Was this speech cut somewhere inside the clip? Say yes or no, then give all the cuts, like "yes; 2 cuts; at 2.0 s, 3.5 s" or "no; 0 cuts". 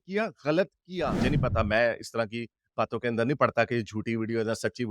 yes; 1 cut; at 1.2 s